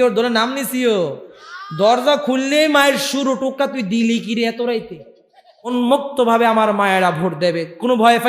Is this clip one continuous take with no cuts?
no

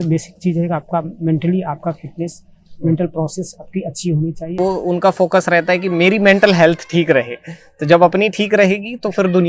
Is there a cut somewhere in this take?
yes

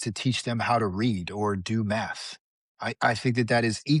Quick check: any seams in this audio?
no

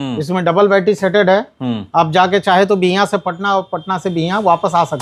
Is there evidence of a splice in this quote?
no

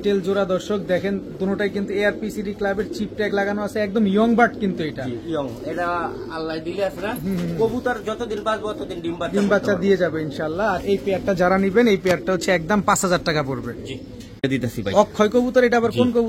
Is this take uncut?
yes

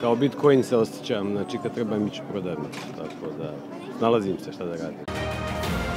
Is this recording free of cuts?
no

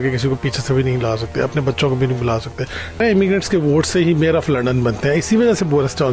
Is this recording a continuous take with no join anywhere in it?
no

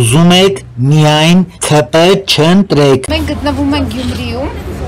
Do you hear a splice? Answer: no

